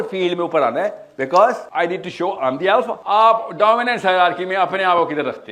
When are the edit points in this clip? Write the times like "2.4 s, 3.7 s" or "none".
1.6 s, 3.0 s